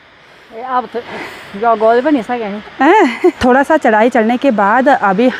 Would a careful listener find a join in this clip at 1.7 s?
no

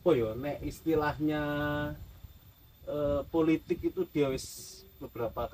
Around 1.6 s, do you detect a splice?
no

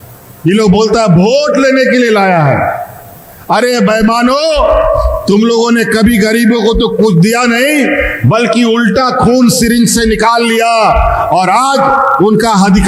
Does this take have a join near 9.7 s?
no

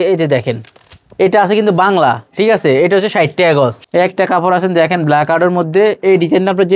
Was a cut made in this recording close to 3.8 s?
yes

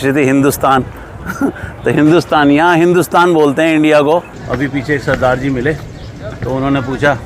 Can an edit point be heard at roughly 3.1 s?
no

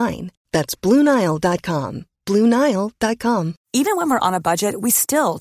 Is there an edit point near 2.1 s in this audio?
no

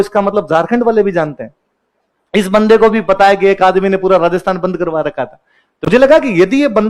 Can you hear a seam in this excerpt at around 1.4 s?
no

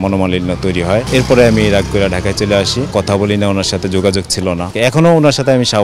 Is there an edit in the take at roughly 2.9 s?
yes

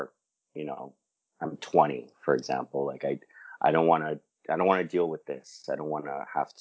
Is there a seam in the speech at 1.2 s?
no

